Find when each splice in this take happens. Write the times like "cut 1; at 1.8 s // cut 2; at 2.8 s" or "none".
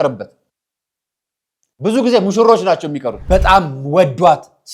cut 1; at 3.1 s

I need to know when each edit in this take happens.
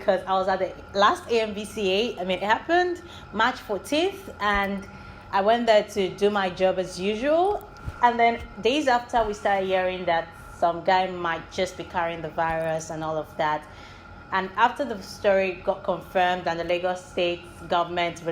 none

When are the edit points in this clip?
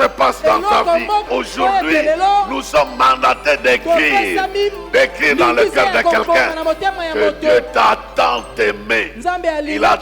cut 1; at 1.3 s

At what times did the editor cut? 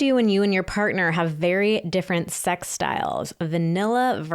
none

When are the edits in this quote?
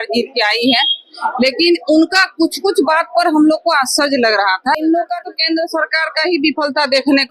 cut 1; at 4.8 s

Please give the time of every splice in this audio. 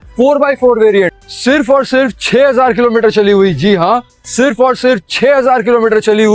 cut 1; at 1.1 s

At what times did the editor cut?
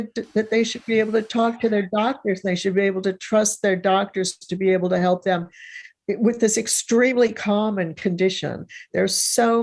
none

